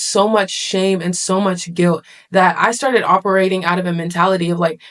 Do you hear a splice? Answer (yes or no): no